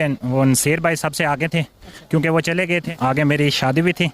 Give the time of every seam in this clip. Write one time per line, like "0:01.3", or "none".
0:02.9